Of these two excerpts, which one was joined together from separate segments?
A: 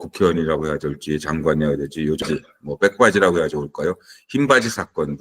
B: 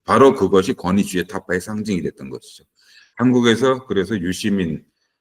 A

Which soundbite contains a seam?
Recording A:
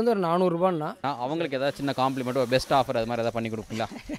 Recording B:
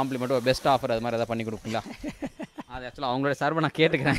A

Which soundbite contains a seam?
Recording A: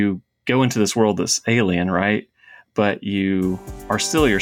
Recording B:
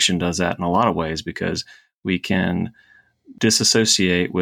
B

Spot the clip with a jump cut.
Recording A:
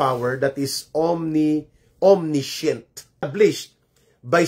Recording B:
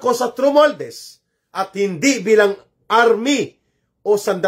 A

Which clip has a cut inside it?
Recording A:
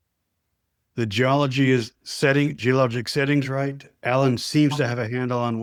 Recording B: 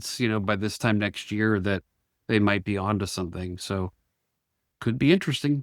B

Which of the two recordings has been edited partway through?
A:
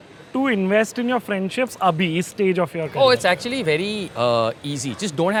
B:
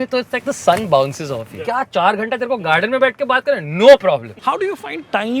B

